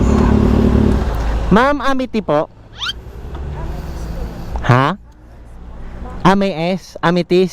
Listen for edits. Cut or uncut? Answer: uncut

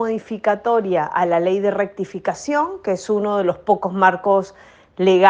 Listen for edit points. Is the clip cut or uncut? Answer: uncut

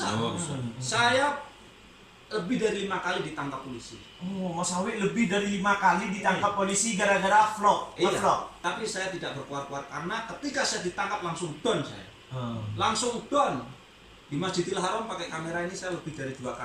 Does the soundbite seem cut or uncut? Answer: uncut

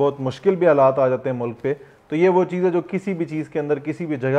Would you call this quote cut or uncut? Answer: uncut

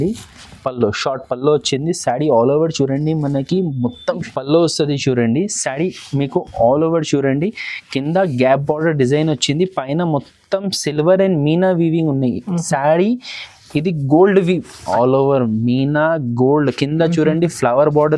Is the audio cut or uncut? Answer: cut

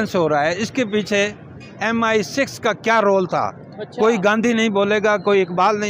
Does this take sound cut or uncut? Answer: uncut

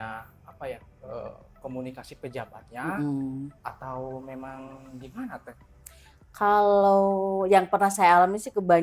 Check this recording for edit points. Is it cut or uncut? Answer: uncut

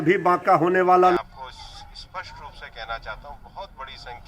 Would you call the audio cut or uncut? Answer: cut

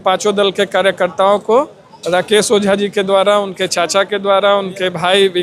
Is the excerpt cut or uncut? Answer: uncut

